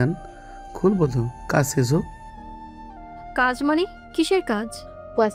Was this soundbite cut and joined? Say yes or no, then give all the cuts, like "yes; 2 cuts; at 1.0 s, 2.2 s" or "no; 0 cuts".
no; 0 cuts